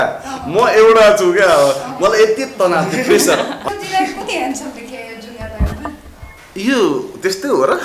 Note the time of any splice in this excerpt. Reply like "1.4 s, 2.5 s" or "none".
3.6 s